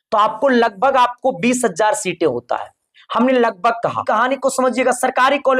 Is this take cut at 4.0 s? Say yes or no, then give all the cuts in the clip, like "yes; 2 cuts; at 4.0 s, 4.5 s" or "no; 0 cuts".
yes; 1 cut; at 4.0 s